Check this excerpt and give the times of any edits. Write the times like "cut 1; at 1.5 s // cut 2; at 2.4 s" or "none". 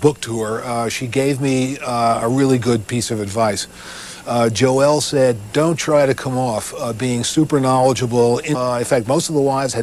none